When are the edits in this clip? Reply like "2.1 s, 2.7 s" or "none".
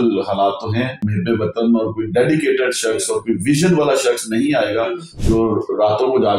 1.0 s, 5.1 s